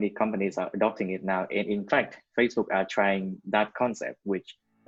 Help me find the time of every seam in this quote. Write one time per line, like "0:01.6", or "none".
none